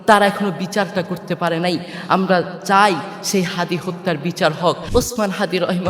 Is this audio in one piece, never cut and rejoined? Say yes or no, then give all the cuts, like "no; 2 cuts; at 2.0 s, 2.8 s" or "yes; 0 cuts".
no; 1 cut; at 4.8 s